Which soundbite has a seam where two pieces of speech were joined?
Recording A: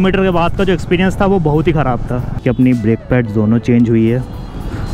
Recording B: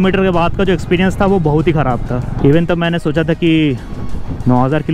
A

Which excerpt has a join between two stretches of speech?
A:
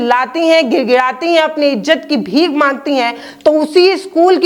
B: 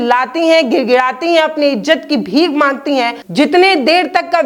B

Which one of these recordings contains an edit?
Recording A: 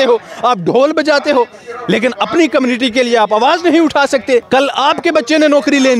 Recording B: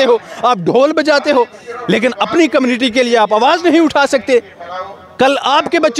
A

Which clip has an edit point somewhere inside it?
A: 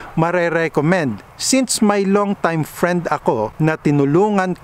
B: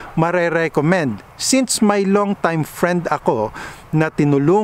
A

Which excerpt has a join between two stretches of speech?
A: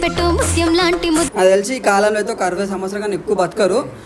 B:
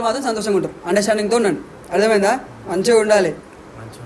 A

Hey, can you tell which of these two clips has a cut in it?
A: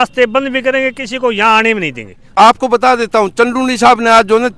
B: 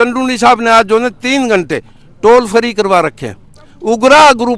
A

